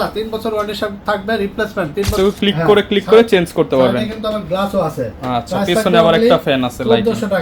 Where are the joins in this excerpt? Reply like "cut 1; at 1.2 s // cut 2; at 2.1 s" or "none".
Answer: cut 1; at 2.2 s